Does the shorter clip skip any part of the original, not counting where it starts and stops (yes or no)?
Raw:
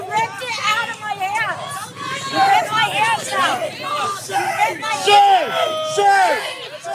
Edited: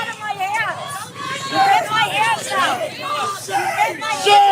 no